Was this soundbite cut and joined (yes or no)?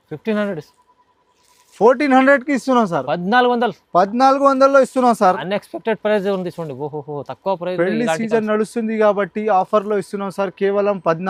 no